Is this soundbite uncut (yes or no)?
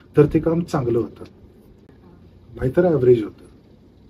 yes